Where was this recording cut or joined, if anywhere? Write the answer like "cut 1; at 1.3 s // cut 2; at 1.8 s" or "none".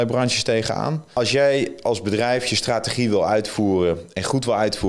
cut 1; at 1.1 s